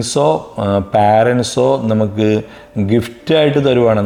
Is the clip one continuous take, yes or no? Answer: yes